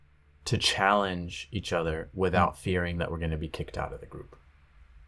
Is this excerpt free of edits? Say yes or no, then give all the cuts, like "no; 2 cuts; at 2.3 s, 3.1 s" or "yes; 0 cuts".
yes; 0 cuts